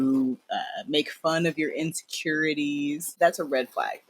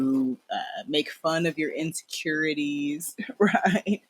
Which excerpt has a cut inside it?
first; 1 cut; at 3.2 s

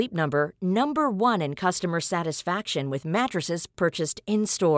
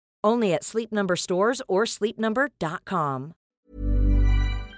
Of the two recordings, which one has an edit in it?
second; 1 cut; at 3.6 s

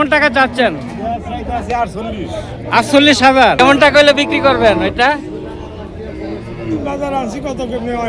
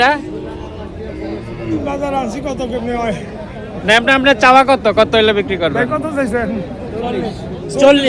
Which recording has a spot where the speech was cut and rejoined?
first; 1 cut; at 3.7 s

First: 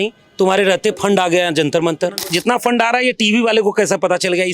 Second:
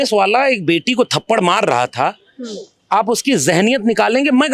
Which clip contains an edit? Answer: first; 1 cut; at 2.3 s

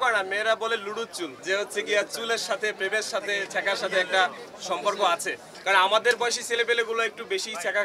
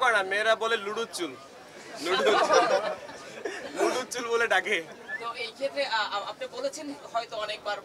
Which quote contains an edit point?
first; 2 cuts; at 1.3 s, 5.5 s

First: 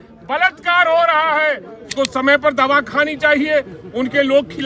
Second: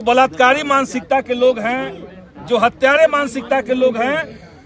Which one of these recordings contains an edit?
first; 1 cut; at 1.9 s

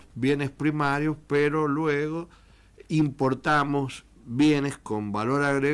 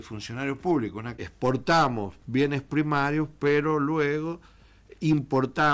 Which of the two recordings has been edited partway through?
second; 1 cut; at 1.2 s

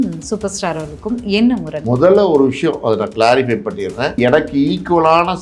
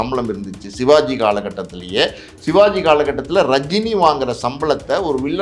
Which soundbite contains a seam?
first; 2 cuts; at 1.7 s, 4.2 s

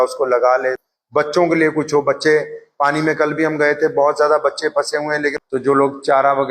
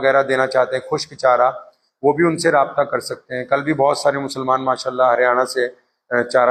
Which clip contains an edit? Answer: first; 2 cuts; at 0.9 s, 5.4 s

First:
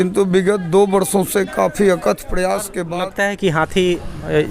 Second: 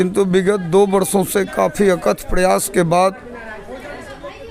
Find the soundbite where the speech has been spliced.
first; 1 cut; at 2.8 s

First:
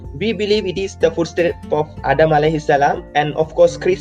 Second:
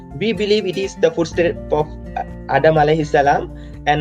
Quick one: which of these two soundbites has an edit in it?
first; 2 cuts; at 1.9 s, 3.0 s

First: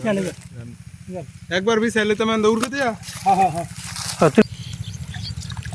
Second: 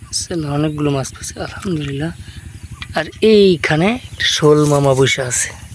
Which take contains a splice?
first; 1 cut; at 4.4 s

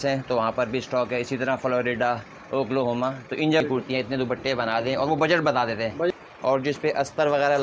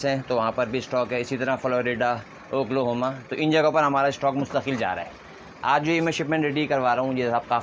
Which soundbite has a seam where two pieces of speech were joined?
first; 2 cuts; at 3.6 s, 6.1 s

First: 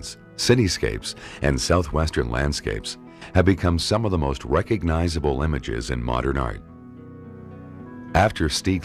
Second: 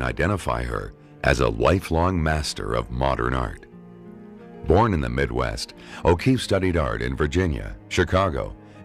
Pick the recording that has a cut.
first; 1 cut; at 7.1 s

